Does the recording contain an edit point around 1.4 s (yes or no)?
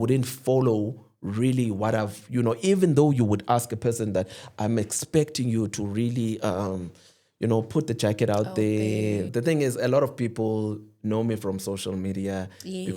no